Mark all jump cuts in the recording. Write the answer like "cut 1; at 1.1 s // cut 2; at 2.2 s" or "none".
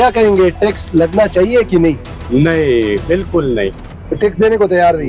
none